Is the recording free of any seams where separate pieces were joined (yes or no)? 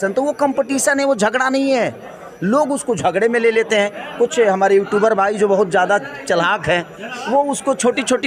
yes